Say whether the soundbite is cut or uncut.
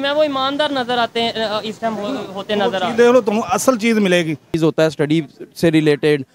cut